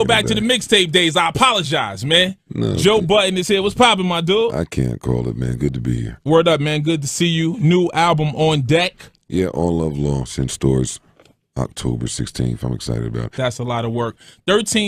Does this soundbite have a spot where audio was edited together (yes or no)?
no